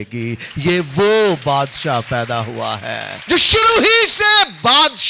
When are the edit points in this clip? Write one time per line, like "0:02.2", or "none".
0:03.1